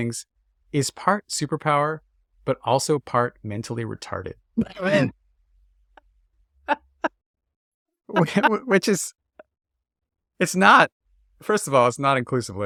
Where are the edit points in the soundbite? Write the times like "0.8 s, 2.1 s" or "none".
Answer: none